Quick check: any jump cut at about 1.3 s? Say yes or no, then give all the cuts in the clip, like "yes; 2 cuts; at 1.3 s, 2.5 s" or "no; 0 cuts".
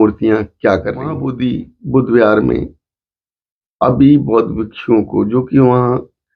yes; 1 cut; at 1.3 s